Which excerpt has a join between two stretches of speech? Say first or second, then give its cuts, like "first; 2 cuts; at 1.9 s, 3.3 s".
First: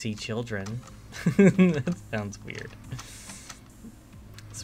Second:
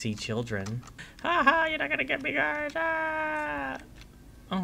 second; 1 cut; at 1.0 s